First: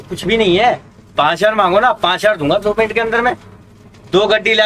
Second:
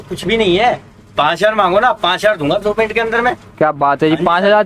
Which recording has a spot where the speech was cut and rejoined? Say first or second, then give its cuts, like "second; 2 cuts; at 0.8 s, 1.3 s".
first; 1 cut; at 3.5 s